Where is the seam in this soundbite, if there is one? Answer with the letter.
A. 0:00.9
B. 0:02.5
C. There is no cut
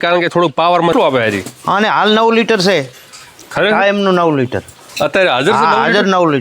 A